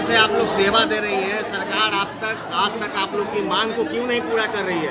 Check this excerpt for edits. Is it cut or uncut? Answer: uncut